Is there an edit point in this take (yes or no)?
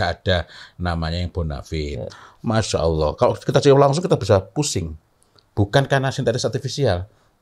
yes